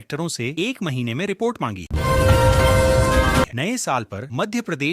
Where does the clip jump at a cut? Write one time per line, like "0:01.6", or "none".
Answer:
0:01.8
0:03.5

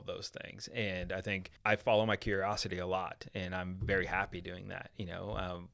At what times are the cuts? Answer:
0:01.5

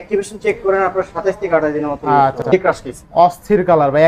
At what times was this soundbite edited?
0:02.4

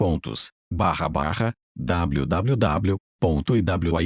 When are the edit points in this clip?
none

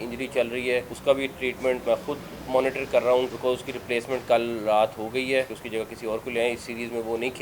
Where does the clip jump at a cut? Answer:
0:00.9
0:01.8
0:03.3
0:05.6

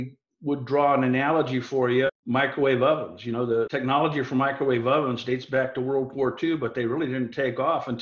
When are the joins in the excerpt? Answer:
0:02.2
0:03.7

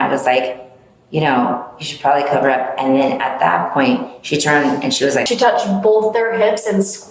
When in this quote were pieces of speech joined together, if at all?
0:05.3

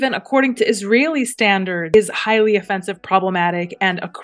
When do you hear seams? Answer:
0:01.9

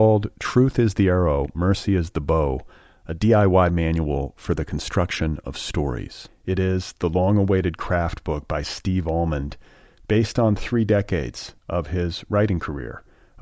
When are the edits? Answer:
none

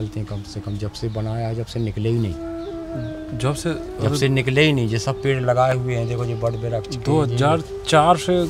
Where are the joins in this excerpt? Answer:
none

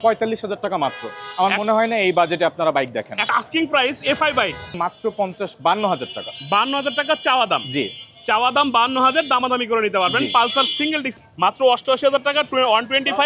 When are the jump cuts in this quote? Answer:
0:03.3
0:04.7
0:11.1

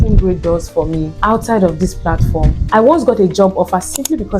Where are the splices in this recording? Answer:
0:01.1
0:02.5

